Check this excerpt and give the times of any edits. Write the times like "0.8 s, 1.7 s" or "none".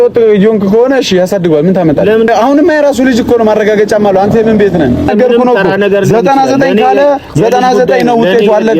2.3 s, 5.1 s